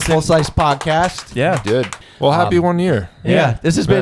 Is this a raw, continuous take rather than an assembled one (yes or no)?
no